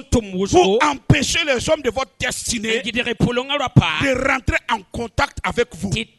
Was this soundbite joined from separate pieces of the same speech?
no; 0 cuts

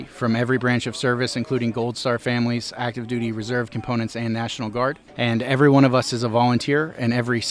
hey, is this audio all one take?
no; 1 cut; at 5.1 s

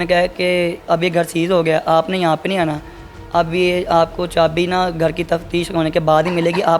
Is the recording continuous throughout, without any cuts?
yes; 0 cuts

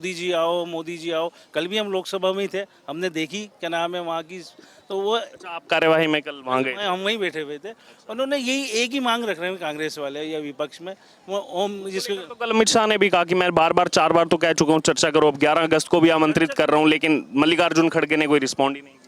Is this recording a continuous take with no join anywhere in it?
yes; 0 cuts

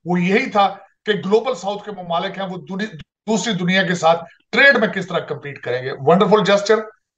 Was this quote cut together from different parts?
no; 0 cuts

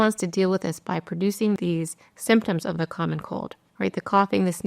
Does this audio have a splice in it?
yes; 1 cut; at 1.6 s

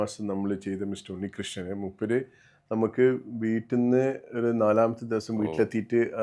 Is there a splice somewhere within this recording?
no; 0 cuts

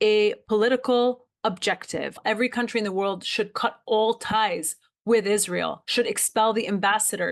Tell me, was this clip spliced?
yes; 2 cuts; at 2.2 s, 5.8 s

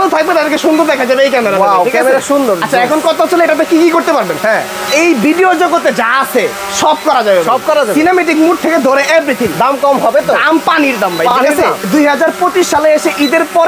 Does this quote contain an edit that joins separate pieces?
no; 0 cuts

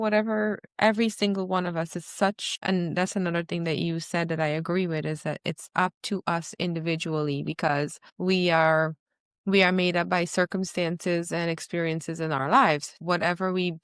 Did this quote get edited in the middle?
yes; 2 cuts; at 2.5 s, 8.0 s

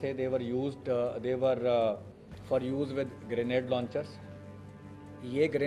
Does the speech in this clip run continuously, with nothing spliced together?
yes; 0 cuts

